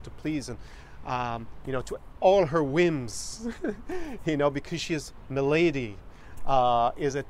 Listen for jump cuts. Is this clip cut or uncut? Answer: uncut